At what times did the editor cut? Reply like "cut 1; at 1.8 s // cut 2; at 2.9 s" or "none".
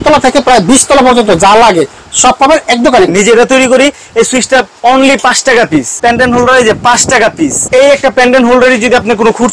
cut 1; at 3.1 s // cut 2; at 5.9 s // cut 3; at 7.6 s